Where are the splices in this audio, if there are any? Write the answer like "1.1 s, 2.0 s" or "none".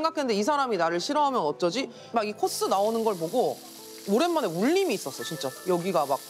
2.0 s